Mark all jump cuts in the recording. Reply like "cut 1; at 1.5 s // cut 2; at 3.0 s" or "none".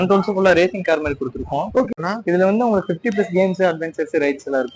cut 1; at 1.9 s

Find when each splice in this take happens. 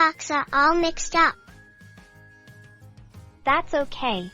cut 1; at 1.4 s // cut 2; at 3.4 s

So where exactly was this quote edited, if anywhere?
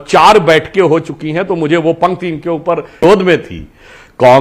cut 1; at 3.0 s

